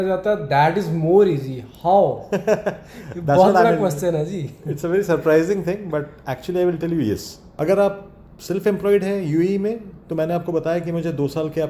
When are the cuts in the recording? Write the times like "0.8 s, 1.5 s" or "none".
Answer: 7.4 s

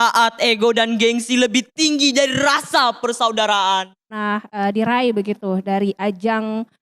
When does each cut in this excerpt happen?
4.2 s

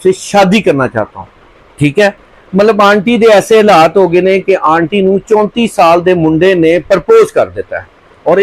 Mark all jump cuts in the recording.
none

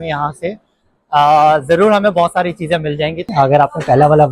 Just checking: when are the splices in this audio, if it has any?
3.3 s

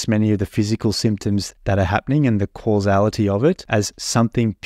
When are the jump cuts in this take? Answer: 1.5 s, 3.6 s

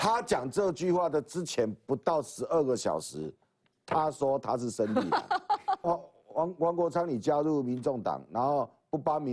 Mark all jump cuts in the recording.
5.9 s

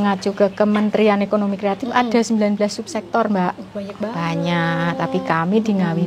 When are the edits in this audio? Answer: none

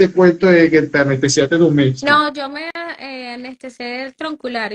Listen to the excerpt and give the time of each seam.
2.7 s

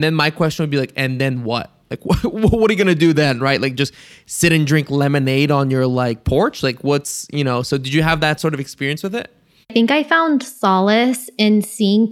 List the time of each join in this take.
9.7 s

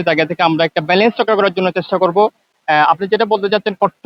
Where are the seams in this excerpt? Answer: none

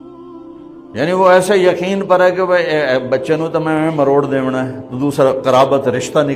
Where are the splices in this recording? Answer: 0.9 s

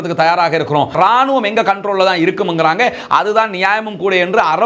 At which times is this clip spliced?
0.9 s

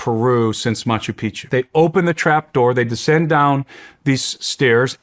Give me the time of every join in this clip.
1.4 s

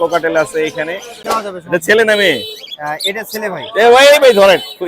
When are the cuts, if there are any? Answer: 1.2 s

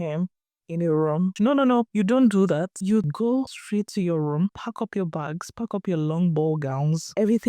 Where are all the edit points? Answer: 1.5 s, 3.1 s

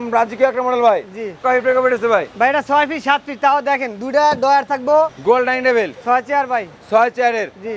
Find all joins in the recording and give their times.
1.4 s, 5.2 s

